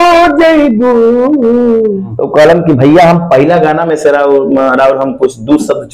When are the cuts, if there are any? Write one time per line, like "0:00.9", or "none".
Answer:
0:02.1